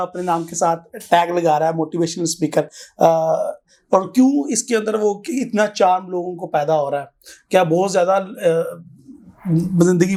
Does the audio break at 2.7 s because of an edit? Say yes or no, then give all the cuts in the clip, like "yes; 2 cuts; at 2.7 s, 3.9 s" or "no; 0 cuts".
no; 0 cuts